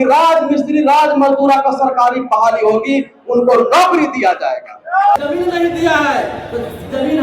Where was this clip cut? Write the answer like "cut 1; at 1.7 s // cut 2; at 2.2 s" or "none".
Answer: cut 1; at 5.2 s